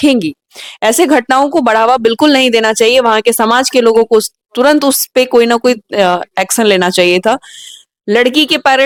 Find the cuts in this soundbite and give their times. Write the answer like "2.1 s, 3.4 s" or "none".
none